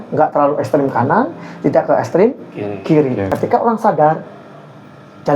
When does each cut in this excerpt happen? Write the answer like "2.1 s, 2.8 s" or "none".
3.3 s